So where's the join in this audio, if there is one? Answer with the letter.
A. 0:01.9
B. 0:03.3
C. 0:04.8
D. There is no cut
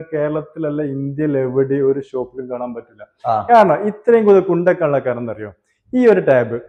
D